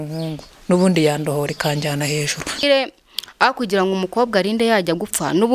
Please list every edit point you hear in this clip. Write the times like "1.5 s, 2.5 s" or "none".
2.6 s